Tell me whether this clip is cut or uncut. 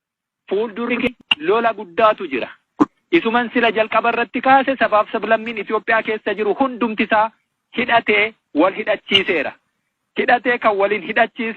cut